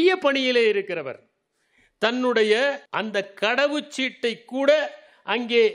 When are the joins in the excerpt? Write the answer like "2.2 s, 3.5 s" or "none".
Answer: 2.9 s